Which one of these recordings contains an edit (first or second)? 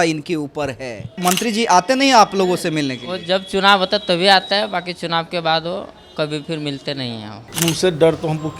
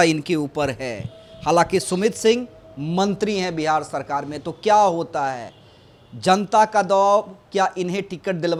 first